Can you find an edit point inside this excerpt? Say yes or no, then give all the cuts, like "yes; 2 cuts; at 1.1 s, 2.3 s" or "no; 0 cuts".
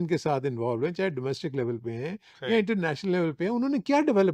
no; 0 cuts